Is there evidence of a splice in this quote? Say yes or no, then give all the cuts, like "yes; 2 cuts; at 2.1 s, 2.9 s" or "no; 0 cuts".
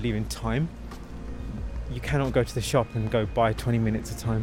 yes; 1 cut; at 1.6 s